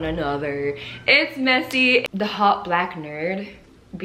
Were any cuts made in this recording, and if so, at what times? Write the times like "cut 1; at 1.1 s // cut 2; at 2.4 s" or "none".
cut 1; at 2.0 s